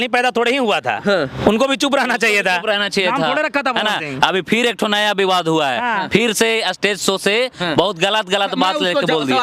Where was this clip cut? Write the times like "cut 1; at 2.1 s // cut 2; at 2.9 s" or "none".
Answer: none